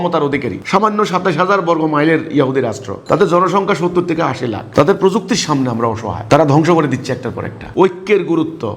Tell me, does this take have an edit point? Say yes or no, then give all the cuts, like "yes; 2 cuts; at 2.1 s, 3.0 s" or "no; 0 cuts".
yes; 1 cut; at 7.7 s